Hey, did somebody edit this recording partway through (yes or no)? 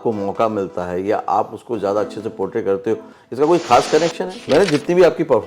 yes